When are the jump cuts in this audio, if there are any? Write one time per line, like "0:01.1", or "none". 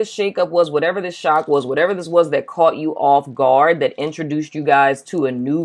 none